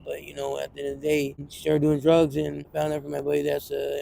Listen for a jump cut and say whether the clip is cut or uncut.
cut